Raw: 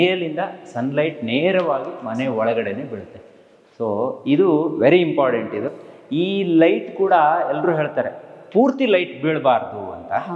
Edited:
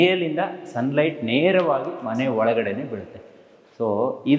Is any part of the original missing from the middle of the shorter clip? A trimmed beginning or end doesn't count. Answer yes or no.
no